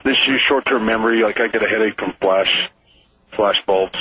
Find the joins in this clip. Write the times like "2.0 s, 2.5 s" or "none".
2.1 s